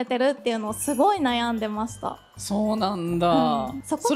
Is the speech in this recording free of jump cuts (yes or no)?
yes